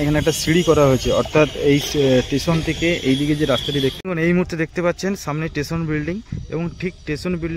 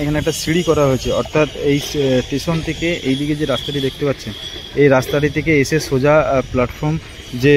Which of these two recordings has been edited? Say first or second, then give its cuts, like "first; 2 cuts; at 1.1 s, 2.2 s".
first; 1 cut; at 4.0 s